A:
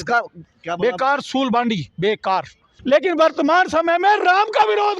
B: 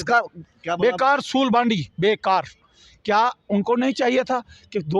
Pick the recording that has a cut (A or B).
A